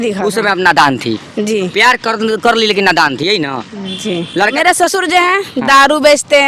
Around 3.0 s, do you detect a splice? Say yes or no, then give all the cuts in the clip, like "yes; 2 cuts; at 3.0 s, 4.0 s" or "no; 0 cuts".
no; 1 cut; at 4.5 s